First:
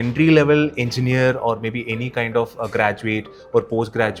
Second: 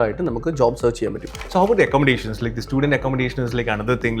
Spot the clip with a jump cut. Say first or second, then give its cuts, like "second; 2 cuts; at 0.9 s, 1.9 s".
second; 1 cut; at 1.3 s